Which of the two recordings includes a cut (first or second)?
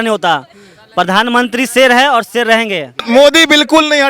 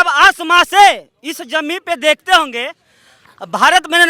first